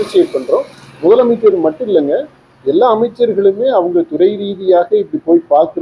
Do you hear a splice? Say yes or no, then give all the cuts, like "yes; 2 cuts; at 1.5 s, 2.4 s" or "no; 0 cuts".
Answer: no; 0 cuts